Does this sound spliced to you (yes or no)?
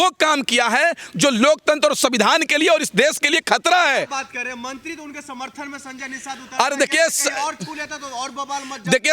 no